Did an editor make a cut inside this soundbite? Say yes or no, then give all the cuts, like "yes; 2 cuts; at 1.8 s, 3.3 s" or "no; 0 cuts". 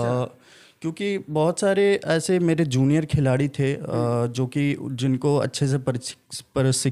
no; 0 cuts